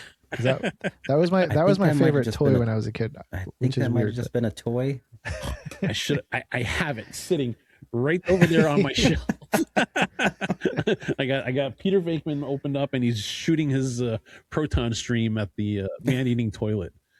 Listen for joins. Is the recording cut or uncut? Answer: uncut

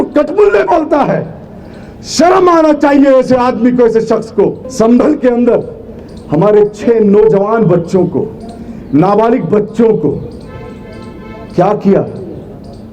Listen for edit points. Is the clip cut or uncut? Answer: cut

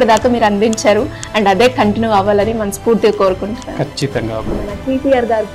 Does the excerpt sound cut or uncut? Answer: cut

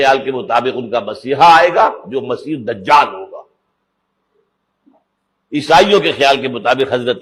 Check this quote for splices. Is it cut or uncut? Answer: uncut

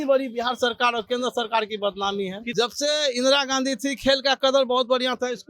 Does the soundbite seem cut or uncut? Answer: cut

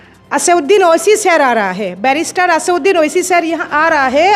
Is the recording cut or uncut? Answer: uncut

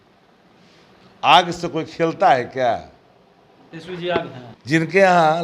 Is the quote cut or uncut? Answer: cut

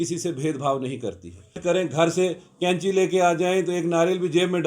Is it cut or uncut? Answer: cut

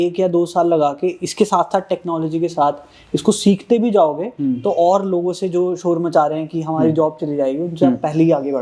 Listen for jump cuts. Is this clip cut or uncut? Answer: uncut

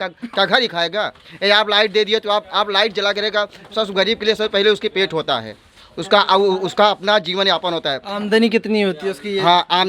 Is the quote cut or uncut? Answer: uncut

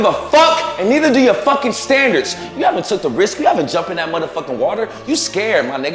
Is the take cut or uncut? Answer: cut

